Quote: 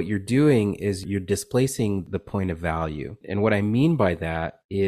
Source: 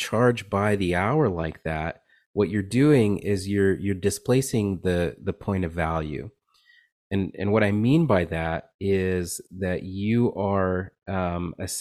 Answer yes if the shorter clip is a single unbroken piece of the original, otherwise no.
no